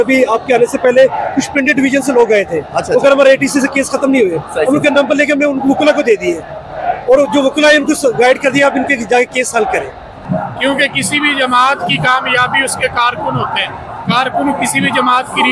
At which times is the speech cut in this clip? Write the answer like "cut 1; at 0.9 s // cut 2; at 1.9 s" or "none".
cut 1; at 10.2 s